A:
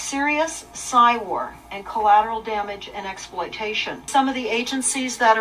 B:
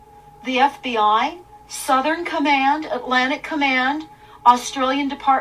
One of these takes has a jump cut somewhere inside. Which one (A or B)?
A